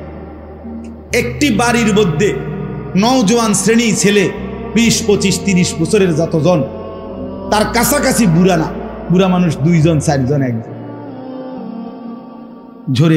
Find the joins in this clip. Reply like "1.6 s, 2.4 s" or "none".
11.2 s, 12.3 s